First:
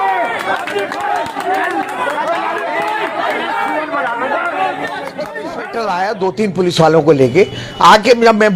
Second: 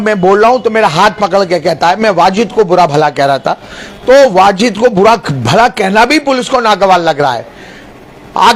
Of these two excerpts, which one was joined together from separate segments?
first; 1 cut; at 5.6 s

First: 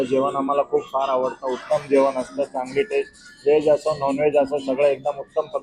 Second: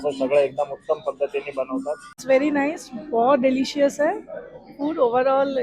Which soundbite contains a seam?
second; 1 cut; at 2.1 s

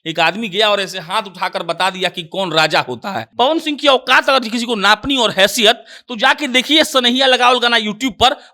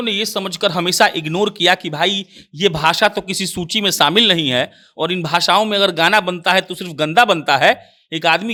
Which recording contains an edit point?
first; 1 cut; at 3.2 s

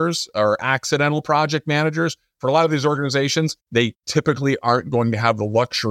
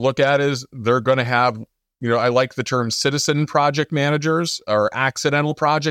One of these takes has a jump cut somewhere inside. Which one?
first; 1 cut; at 3.7 s

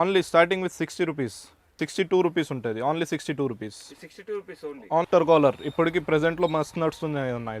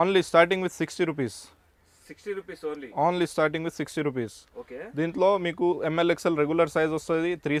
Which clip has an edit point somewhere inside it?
first; 2 cuts; at 1.8 s, 5.0 s

